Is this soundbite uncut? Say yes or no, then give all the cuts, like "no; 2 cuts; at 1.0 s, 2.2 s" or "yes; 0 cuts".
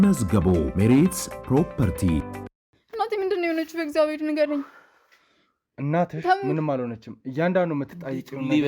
no; 1 cut; at 2.8 s